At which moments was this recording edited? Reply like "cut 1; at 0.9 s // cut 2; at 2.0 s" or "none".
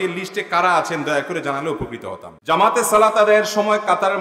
cut 1; at 2.3 s

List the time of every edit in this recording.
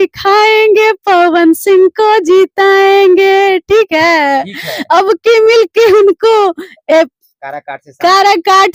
none

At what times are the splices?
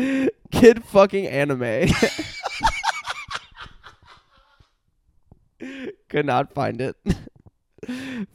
none

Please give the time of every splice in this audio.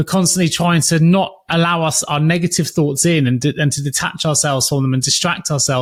none

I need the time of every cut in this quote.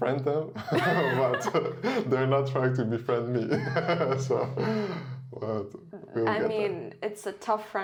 none

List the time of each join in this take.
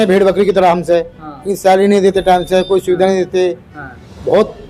none

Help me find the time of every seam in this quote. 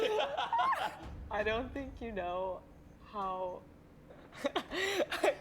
cut 1; at 1.1 s // cut 2; at 4.3 s

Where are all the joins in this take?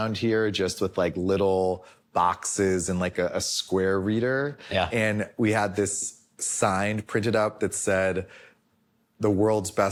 none

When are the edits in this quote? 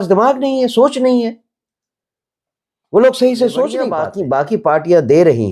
cut 1; at 3.9 s

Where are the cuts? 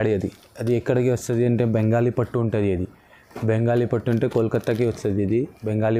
none

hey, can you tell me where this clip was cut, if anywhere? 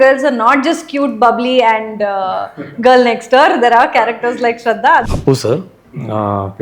cut 1; at 5.1 s

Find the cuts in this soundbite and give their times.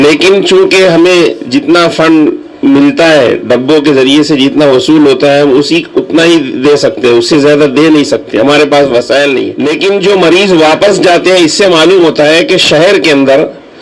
cut 1; at 9.5 s

